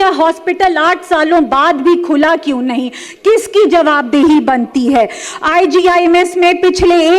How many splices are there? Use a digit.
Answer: 0